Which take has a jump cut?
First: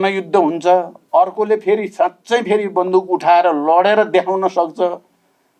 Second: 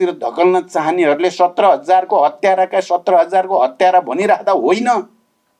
first; 1 cut; at 1.0 s

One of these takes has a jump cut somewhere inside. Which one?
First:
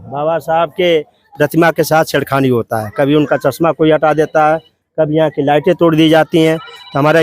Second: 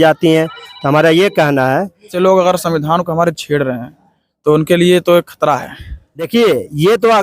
second; 2 cuts; at 2.1 s, 6.3 s

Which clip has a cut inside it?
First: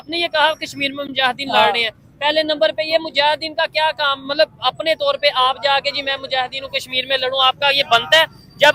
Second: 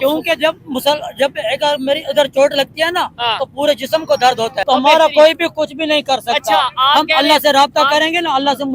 second; 1 cut; at 4.6 s

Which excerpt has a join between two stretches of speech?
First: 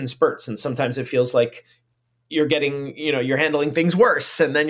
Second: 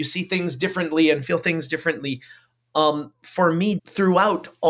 second; 1 cut; at 3.8 s

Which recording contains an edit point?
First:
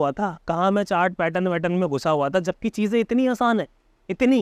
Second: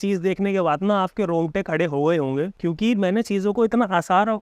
second; 1 cut; at 2.5 s

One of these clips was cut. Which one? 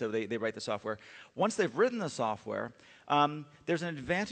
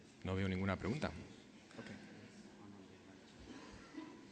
second; 1 cut; at 1.2 s

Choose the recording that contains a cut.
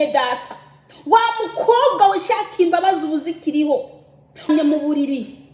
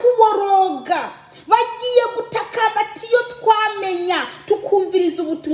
first; 1 cut; at 4.5 s

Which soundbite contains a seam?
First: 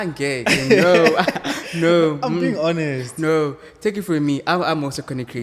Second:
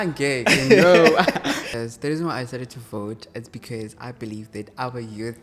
second; 1 cut; at 1.6 s

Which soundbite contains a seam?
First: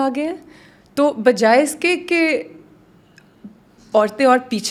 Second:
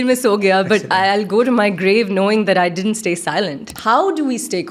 second; 1 cut; at 3.8 s

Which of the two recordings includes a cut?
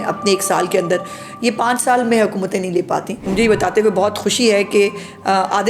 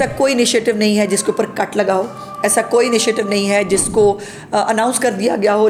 first; 1 cut; at 3.2 s

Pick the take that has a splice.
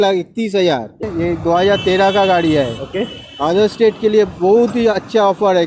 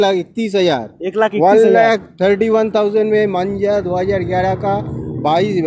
first; 1 cut; at 1.1 s

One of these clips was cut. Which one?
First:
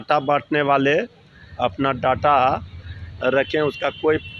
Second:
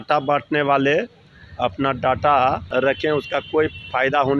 second; 1 cut; at 2.6 s

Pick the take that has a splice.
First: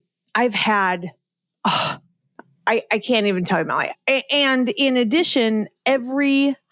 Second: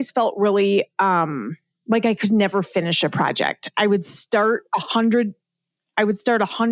first; 1 cut; at 3.9 s

